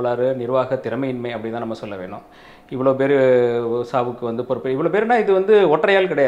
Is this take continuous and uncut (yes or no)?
yes